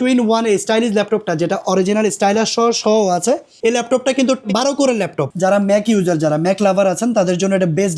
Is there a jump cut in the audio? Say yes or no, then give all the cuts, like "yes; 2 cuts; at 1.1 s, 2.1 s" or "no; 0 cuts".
yes; 1 cut; at 5.2 s